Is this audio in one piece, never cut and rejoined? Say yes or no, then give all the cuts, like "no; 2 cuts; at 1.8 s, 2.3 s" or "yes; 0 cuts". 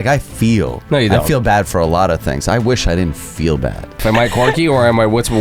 no; 1 cut; at 4.0 s